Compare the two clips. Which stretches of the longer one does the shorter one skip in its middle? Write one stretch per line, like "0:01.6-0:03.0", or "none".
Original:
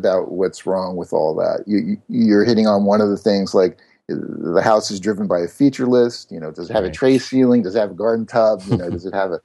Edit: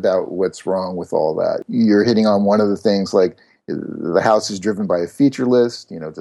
0:01.6-0:02.0